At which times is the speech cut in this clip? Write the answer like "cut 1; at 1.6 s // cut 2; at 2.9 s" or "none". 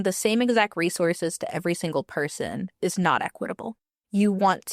cut 1; at 3.8 s